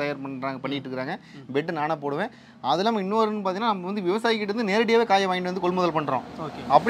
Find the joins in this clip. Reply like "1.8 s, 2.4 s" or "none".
none